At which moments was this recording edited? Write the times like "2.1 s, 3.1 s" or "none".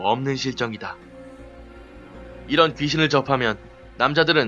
3.2 s